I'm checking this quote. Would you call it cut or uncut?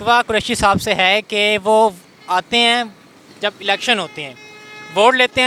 uncut